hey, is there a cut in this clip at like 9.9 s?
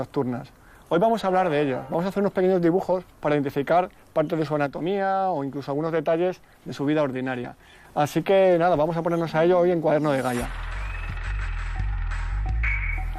no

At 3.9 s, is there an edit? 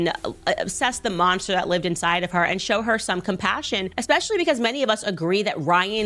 yes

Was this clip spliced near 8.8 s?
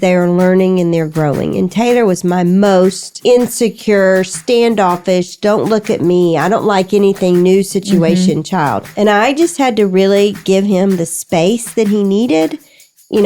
yes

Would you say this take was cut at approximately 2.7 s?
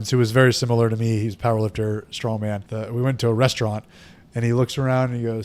yes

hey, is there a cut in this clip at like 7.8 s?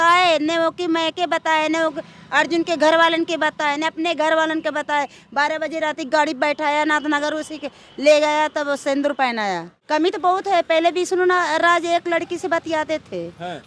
no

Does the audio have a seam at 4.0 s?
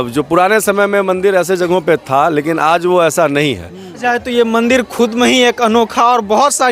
yes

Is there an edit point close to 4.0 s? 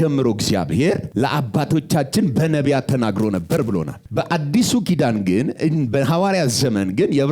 yes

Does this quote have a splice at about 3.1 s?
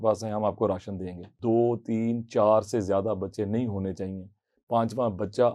no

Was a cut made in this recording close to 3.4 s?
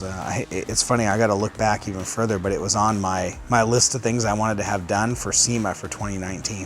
yes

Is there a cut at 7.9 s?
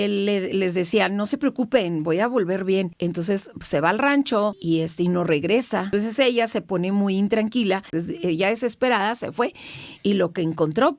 yes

